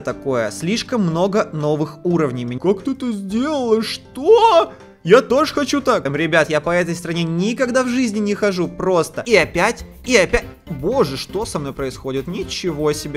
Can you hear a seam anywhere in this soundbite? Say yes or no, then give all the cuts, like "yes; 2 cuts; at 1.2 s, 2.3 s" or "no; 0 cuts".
yes; 3 cuts; at 2.5 s, 6.1 s, 9.2 s